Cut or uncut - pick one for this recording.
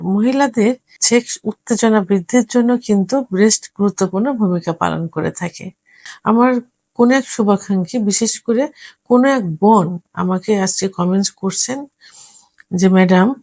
cut